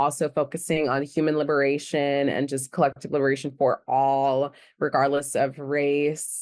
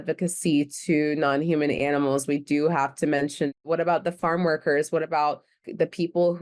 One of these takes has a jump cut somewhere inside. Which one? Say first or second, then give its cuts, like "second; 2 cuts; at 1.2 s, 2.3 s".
second; 2 cuts; at 3.6 s, 5.6 s